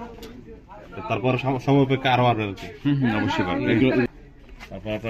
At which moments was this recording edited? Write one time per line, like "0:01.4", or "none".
0:04.0